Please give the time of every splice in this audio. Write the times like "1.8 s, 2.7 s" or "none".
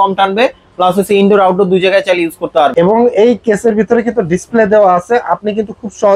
2.7 s

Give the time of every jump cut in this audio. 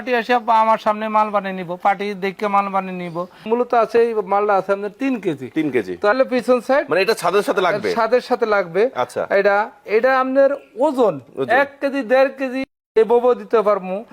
3.4 s, 6.1 s

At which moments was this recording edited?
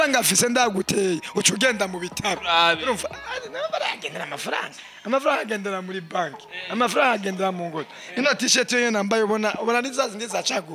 none

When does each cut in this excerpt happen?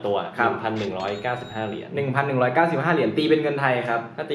none

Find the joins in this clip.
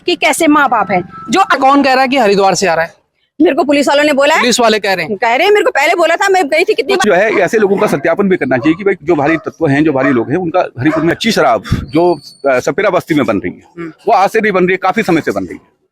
1.6 s, 7.1 s, 11.2 s

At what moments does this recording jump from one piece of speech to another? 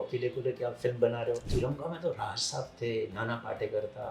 1.5 s

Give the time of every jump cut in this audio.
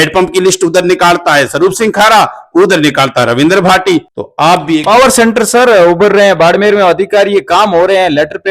4.2 s

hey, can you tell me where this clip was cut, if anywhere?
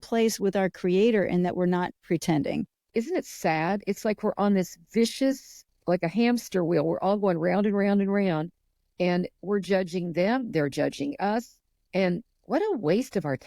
2.9 s

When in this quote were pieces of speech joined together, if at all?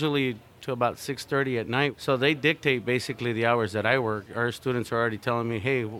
2.0 s, 4.2 s

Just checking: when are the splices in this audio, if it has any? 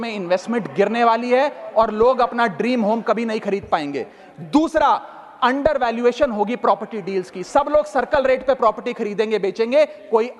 none

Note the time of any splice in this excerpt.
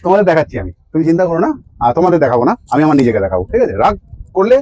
none

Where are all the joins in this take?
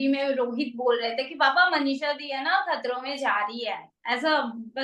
none

